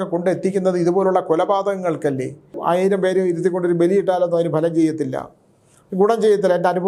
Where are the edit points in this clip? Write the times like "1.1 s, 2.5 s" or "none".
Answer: 2.6 s